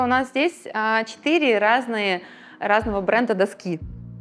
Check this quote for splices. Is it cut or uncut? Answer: uncut